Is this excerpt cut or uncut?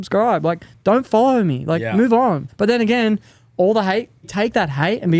cut